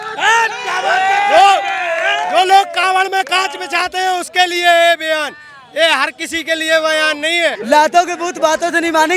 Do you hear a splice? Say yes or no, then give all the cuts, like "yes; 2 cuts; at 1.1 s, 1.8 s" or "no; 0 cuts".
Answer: yes; 1 cut; at 7.6 s